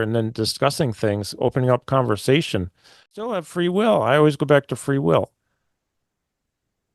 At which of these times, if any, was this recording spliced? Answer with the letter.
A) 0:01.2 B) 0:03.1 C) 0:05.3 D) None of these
B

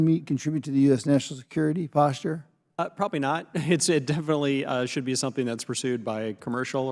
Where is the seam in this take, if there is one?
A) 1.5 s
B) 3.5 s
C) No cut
C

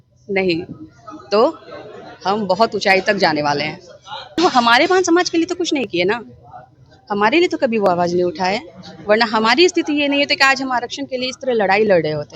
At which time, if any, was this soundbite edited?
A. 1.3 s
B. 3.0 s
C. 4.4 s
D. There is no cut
C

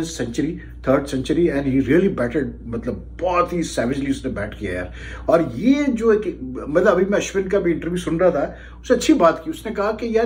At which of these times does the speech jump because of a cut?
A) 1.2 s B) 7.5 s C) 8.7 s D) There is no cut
D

